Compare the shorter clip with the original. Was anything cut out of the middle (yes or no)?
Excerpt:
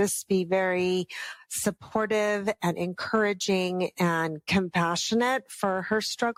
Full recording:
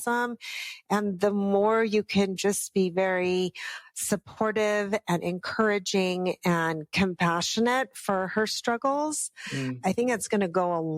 no